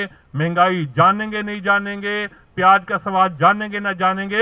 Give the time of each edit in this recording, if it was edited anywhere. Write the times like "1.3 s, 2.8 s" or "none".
none